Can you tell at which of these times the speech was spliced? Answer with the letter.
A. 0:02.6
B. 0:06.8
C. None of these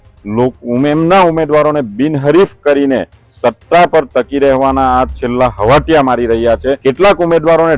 B